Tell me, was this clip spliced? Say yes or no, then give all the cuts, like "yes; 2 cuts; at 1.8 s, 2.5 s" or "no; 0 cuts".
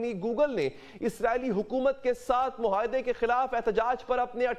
no; 0 cuts